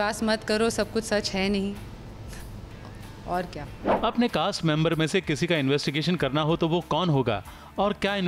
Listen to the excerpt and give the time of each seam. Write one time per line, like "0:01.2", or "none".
none